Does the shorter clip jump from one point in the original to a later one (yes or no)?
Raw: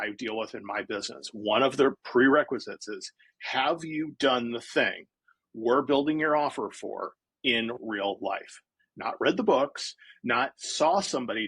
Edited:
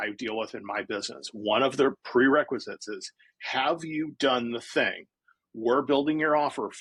no